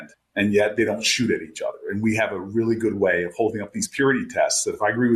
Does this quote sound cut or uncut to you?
uncut